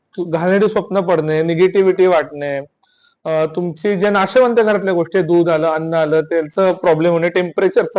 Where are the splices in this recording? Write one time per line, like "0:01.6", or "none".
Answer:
none